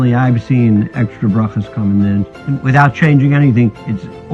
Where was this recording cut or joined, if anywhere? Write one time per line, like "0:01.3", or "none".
0:02.4